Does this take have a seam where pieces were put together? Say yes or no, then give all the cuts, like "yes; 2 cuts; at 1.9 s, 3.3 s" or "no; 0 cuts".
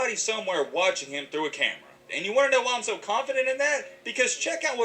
yes; 1 cut; at 2.1 s